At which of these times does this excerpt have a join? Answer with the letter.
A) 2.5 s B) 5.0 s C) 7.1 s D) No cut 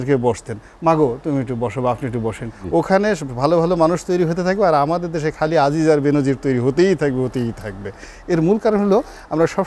A